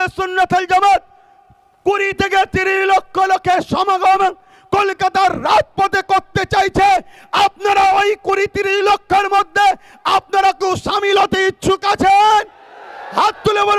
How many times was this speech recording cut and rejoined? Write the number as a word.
zero